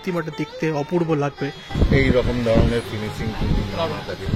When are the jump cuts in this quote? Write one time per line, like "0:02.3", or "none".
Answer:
0:01.6